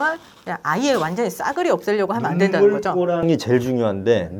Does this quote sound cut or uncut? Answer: uncut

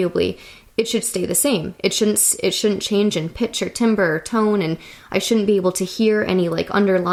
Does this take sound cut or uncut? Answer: uncut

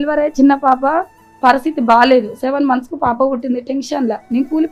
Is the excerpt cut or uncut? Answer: uncut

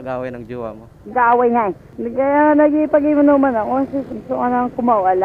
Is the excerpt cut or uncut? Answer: cut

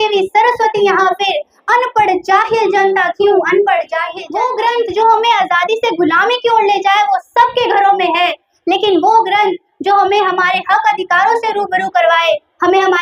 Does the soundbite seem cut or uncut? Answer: cut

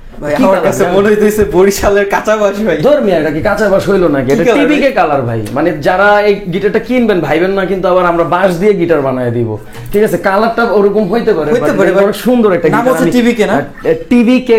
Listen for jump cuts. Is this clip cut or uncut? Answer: uncut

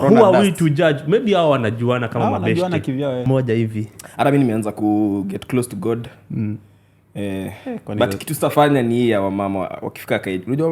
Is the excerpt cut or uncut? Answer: cut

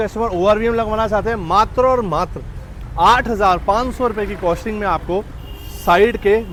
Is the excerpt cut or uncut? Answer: uncut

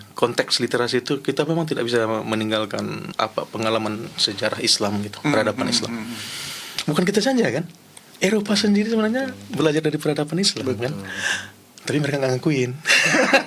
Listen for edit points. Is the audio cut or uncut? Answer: cut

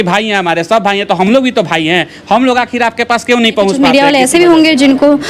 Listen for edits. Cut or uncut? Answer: cut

